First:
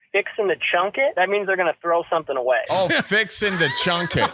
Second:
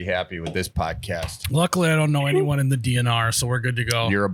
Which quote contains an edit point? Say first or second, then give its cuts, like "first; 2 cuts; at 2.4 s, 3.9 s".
first; 2 cuts; at 1.1 s, 2.7 s